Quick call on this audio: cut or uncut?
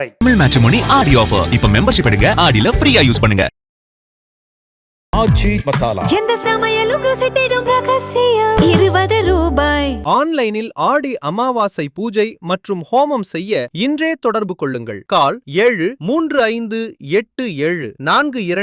uncut